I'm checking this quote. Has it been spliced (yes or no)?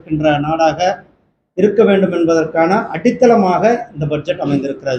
no